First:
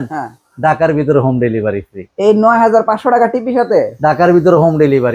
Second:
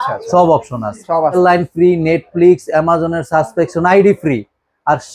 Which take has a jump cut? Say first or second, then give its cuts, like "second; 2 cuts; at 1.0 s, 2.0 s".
second; 1 cut; at 1.4 s